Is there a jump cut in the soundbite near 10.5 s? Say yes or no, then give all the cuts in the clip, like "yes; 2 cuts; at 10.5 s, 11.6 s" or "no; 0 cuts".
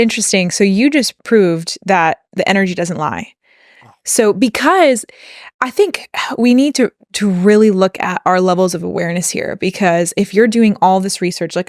no; 1 cut; at 1.2 s